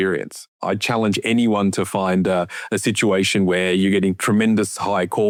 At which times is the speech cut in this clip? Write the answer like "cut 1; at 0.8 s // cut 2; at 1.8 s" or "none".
none